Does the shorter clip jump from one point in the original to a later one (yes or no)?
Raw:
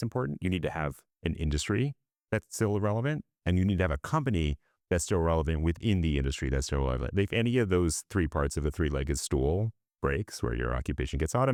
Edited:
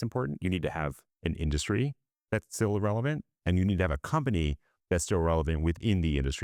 no